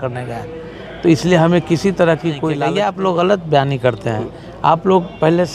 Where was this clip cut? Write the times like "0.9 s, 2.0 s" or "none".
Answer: 2.6 s